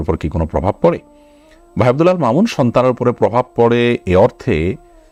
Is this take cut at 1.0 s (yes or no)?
no